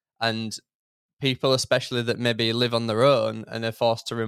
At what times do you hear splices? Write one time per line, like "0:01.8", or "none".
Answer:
none